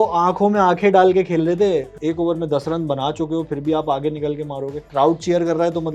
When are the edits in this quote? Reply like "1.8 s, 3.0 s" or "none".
1.9 s, 4.8 s